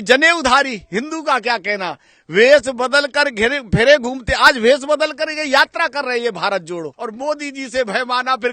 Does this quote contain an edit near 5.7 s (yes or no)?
no